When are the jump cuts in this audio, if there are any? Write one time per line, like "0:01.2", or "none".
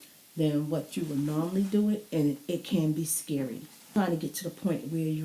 0:03.7